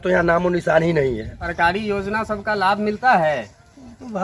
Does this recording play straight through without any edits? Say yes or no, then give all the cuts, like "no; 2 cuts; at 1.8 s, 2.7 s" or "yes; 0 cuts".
no; 1 cut; at 1.4 s